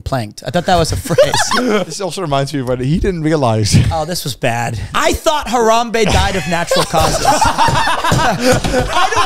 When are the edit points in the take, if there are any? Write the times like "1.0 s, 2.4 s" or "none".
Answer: 1.9 s, 4.8 s